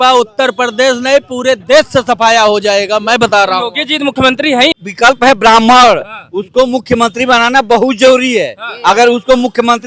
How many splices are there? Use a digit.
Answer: 1